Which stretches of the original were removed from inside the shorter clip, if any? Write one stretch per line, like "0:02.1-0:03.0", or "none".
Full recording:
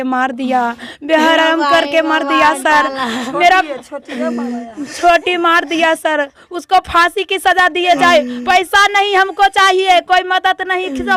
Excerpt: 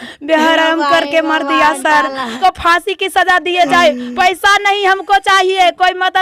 0:03.1-0:06.6